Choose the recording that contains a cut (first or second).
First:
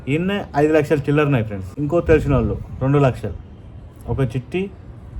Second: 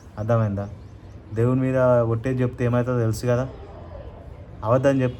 first